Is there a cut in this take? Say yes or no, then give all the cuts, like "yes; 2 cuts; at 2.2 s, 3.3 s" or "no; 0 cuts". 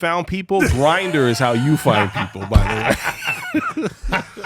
no; 0 cuts